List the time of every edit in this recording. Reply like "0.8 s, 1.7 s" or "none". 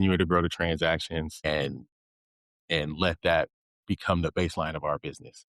1.4 s